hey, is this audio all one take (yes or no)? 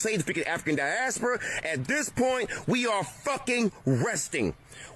yes